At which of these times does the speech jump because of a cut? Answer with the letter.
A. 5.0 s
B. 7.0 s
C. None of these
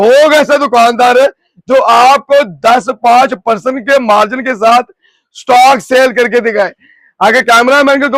C